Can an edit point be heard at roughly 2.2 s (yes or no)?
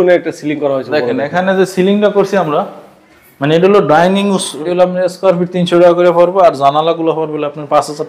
no